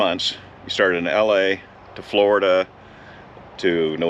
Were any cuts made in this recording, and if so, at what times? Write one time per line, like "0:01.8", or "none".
none